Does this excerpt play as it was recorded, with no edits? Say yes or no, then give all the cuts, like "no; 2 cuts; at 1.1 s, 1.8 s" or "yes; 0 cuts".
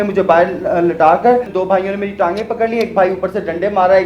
no; 1 cut; at 1.5 s